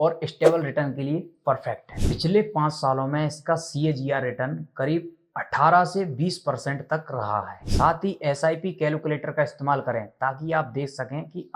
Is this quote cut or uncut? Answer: cut